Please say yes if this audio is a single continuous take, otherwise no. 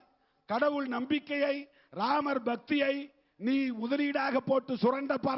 yes